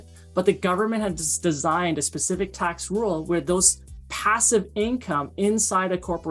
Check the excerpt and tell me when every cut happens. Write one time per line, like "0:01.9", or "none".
none